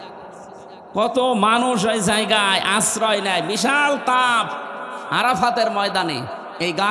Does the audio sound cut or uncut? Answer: uncut